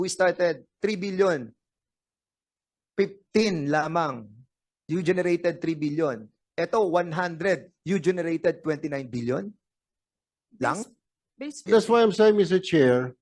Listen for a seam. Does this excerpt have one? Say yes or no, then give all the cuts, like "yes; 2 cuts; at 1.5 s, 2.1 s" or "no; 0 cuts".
yes; 1 cut; at 11.7 s